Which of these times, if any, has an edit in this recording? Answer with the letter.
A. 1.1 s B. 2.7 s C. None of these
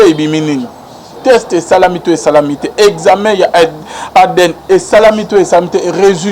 A